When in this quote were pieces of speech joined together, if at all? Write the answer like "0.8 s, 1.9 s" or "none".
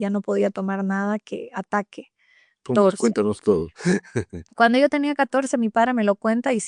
2.6 s